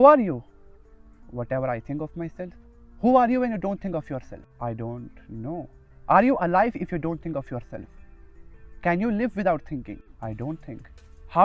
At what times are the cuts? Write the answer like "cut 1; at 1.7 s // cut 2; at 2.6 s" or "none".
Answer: cut 1; at 4.4 s // cut 2; at 10.1 s